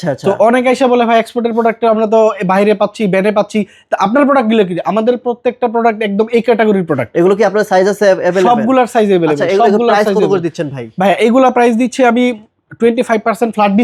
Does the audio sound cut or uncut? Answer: uncut